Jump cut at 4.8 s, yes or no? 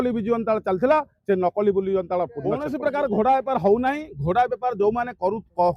no